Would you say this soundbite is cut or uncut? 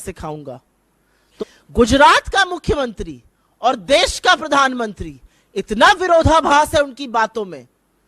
cut